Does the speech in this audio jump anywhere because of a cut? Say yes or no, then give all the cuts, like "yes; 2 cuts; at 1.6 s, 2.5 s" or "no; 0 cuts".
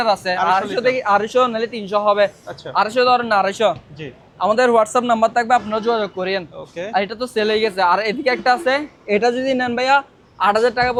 no; 0 cuts